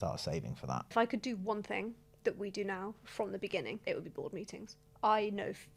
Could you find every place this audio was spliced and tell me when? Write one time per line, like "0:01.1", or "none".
0:00.9
0:03.8
0:04.8